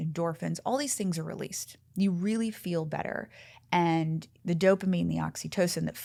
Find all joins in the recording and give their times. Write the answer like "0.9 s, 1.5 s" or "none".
none